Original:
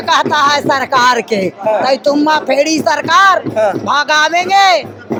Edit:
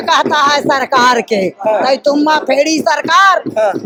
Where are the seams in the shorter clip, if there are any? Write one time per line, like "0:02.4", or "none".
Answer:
none